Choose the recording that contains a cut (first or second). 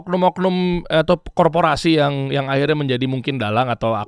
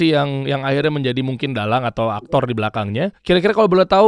second